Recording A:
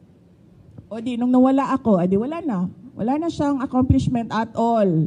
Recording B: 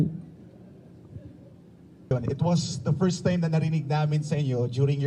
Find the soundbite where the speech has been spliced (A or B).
B